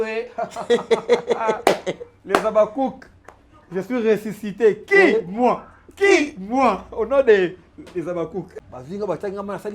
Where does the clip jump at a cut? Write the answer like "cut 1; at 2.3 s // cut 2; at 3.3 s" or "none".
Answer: cut 1; at 8.5 s